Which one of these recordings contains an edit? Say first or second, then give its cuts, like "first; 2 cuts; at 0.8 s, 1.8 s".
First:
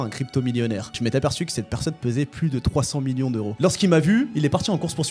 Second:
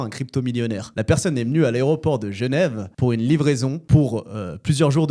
first; 2 cuts; at 0.9 s, 3.5 s